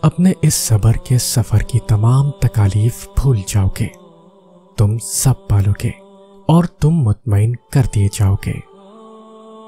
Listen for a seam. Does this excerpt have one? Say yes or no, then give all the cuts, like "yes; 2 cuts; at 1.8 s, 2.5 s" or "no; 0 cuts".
no; 0 cuts